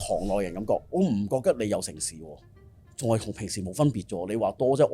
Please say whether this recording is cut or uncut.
uncut